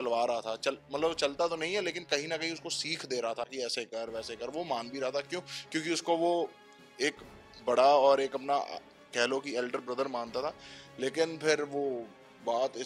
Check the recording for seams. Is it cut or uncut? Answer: uncut